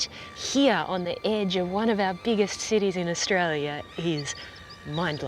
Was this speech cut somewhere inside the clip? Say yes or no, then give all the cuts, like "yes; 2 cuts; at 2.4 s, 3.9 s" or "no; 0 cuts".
no; 0 cuts